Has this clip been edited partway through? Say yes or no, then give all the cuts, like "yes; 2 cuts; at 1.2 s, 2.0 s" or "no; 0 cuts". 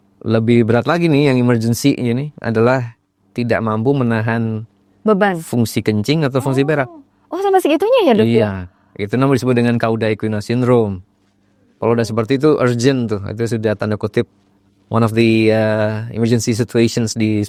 no; 0 cuts